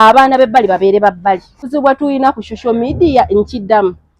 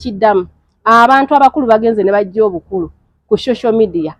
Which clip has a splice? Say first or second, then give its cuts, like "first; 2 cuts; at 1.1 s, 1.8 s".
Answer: first; 1 cut; at 1.7 s